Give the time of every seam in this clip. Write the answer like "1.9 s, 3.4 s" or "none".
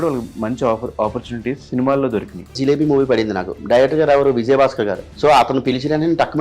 2.5 s, 5.0 s